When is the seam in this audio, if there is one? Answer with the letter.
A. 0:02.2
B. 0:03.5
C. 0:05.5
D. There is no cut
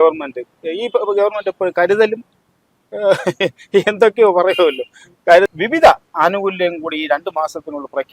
C